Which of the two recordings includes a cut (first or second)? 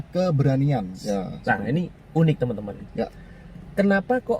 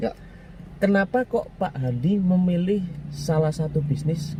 first